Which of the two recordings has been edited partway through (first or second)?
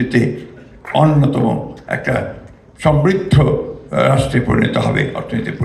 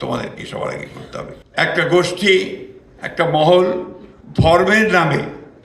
second